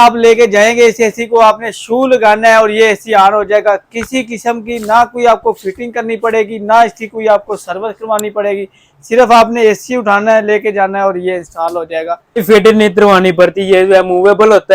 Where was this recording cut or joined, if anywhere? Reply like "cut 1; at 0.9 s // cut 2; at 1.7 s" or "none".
cut 1; at 12.4 s